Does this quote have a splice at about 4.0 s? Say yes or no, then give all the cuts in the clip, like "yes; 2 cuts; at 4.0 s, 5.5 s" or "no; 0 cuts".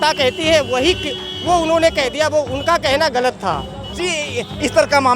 yes; 1 cut; at 4.0 s